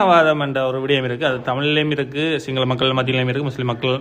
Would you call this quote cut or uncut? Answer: uncut